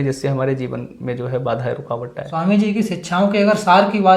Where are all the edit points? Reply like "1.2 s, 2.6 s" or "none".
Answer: 2.2 s